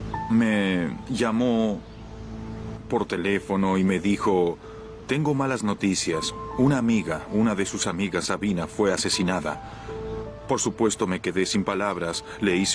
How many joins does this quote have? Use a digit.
1